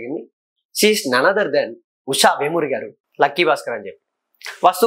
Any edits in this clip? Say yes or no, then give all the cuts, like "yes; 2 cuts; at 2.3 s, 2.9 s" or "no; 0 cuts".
yes; 1 cut; at 3.0 s